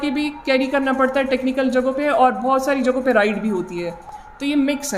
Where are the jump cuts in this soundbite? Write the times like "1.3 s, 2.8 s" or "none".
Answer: none

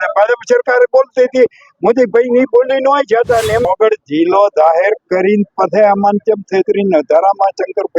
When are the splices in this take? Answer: 3.7 s

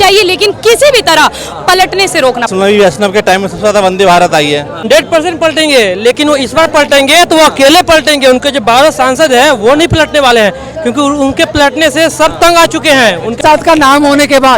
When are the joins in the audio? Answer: 2.5 s, 4.8 s, 13.4 s

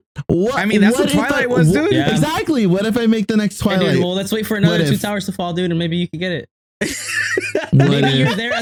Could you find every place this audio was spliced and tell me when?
none

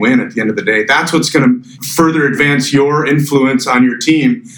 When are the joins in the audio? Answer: 1.8 s

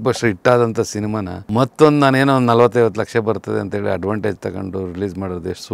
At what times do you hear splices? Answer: 1.3 s

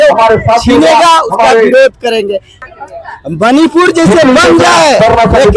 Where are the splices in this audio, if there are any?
2.6 s

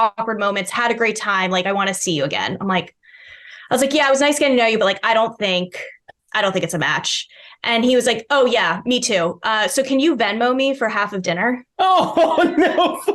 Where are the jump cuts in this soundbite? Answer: none

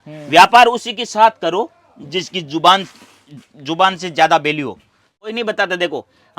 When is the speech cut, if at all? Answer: 5.3 s

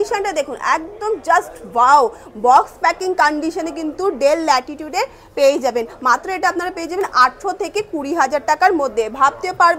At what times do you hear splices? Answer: none

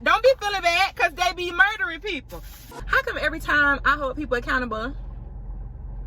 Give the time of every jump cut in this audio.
2.6 s

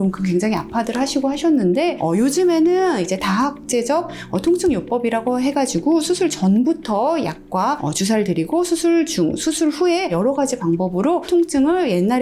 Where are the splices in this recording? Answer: none

